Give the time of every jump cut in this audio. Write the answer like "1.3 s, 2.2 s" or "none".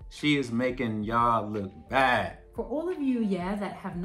2.4 s